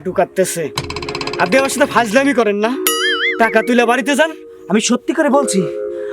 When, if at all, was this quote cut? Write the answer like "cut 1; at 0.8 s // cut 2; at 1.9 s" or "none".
none